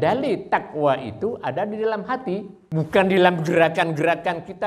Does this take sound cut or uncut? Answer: cut